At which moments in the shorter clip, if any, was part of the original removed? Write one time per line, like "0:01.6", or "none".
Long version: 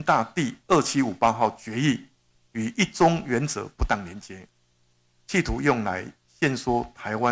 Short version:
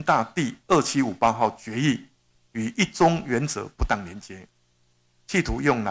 none